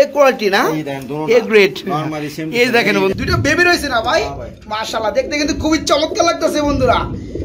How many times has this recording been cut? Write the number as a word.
one